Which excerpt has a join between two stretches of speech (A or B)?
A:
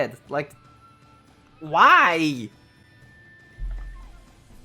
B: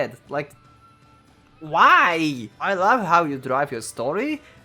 B